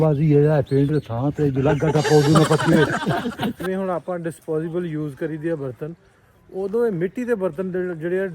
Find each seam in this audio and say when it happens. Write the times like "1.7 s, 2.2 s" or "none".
3.7 s